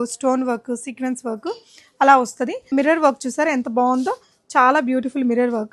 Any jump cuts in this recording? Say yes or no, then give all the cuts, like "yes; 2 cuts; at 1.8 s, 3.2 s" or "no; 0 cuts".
yes; 1 cut; at 2.7 s